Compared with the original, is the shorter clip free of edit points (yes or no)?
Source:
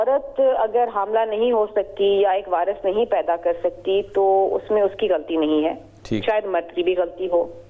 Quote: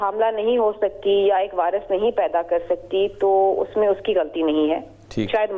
yes